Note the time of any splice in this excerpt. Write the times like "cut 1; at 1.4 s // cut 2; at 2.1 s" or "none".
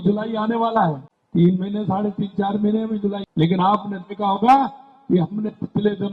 cut 1; at 1.1 s // cut 2; at 3.2 s

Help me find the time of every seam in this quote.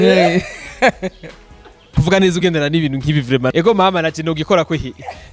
cut 1; at 2.0 s // cut 2; at 3.5 s

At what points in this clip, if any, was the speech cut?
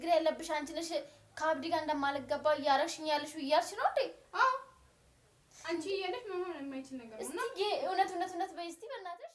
none

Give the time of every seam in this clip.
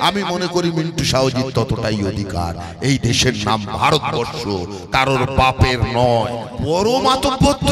cut 1; at 6.5 s

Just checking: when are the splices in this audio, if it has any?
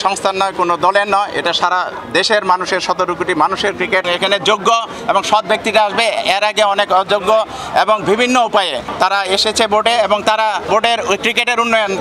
cut 1; at 4.1 s // cut 2; at 8.9 s // cut 3; at 10.7 s

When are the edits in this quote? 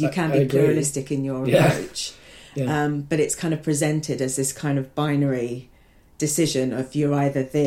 none

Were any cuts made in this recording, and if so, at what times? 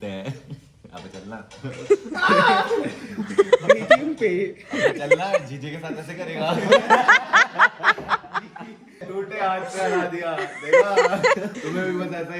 cut 1; at 8.9 s // cut 2; at 11.6 s

